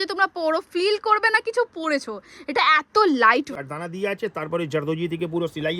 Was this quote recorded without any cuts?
no; 1 cut; at 3.6 s

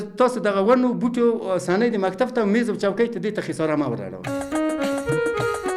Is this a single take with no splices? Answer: no; 1 cut; at 4.2 s

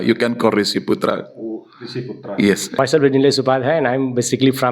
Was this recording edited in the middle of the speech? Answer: yes; 1 cut; at 2.8 s

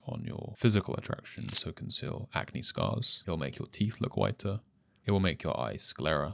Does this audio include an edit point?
yes; 1 cut; at 1.6 s

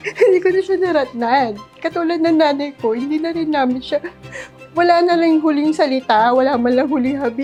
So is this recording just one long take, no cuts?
yes; 0 cuts

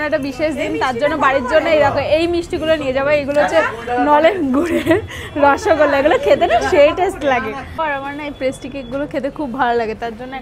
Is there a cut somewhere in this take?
yes; 1 cut; at 7.8 s

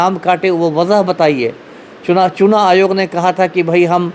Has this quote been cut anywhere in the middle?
no; 0 cuts

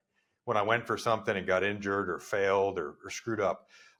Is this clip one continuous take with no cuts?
yes; 0 cuts

